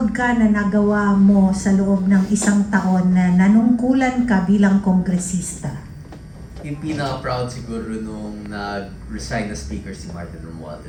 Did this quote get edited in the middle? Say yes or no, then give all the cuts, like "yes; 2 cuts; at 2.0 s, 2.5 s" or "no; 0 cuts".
no; 0 cuts